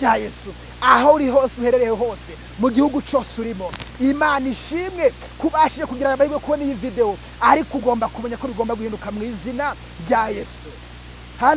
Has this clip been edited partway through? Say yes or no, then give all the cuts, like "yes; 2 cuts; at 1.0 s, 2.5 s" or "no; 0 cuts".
no; 0 cuts